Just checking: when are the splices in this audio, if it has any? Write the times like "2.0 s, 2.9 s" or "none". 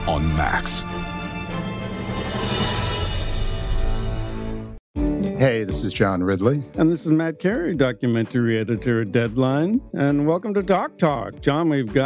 4.8 s